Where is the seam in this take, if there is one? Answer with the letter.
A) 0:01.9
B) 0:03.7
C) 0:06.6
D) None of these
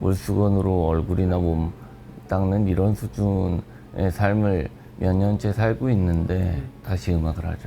C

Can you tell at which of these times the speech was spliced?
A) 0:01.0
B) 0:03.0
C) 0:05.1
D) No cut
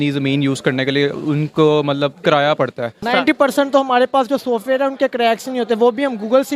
B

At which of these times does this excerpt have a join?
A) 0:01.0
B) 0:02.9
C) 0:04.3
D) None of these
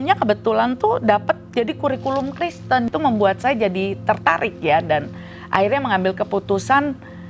B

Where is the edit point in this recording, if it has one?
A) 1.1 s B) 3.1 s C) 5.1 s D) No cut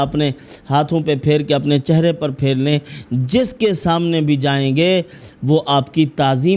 D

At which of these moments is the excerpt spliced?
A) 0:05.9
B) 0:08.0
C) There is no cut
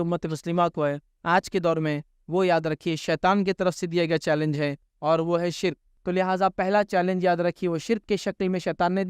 A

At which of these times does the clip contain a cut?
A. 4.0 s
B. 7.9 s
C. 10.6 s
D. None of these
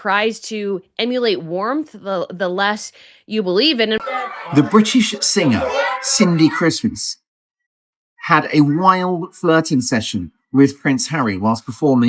A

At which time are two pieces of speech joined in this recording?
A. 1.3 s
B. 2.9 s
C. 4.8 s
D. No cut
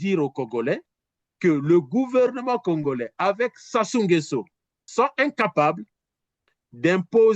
C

